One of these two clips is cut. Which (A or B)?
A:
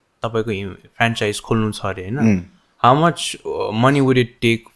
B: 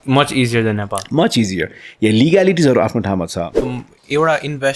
B